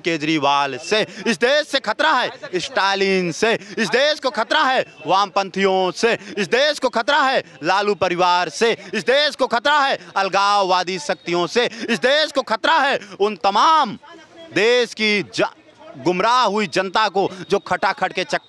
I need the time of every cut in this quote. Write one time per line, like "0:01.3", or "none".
none